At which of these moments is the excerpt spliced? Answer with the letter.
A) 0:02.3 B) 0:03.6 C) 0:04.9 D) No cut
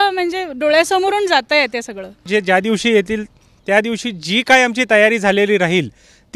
A